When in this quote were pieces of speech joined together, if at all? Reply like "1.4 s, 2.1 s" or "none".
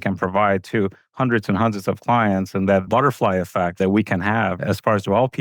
3.8 s